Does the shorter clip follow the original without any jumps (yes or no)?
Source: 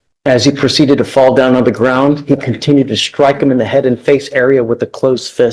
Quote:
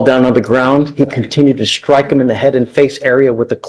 yes